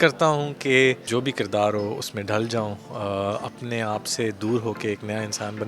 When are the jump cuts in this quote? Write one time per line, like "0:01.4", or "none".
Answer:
0:01.0